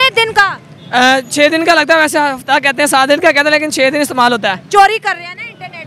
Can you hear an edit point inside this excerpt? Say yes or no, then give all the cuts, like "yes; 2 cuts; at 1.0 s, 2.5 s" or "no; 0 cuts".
no; 0 cuts